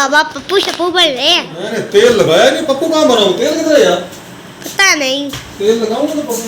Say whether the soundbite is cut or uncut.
uncut